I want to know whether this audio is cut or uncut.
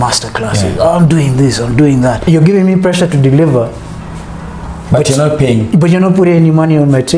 cut